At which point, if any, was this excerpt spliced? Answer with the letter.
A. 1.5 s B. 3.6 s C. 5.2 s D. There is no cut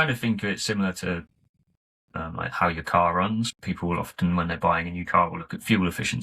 B